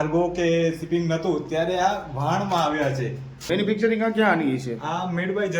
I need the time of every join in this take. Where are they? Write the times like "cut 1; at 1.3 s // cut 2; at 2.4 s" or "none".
cut 1; at 3.5 s